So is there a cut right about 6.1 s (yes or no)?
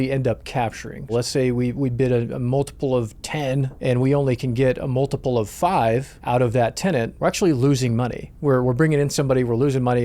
yes